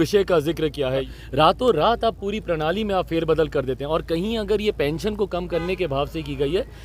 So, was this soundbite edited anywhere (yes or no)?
yes